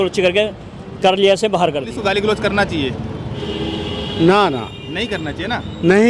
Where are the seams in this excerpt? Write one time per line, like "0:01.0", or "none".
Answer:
0:01.9